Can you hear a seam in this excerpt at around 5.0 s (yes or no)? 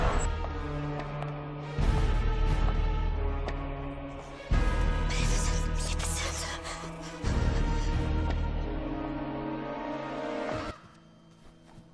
yes